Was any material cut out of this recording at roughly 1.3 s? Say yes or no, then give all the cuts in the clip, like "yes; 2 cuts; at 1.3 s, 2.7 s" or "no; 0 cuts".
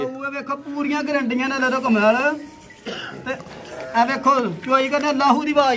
no; 0 cuts